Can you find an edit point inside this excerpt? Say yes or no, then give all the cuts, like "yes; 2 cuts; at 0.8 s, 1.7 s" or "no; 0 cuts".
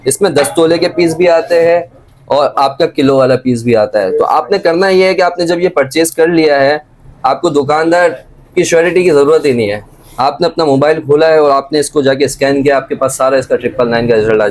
no; 0 cuts